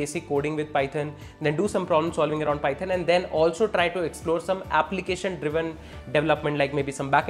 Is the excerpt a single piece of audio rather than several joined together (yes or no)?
yes